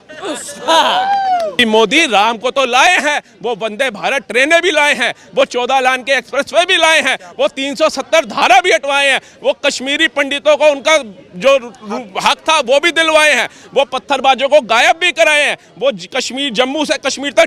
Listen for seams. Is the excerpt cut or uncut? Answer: cut